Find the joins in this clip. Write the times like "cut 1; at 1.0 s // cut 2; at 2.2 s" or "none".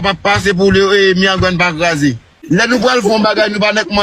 cut 1; at 2.6 s